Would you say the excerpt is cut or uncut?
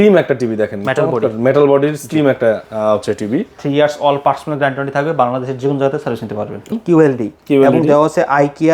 cut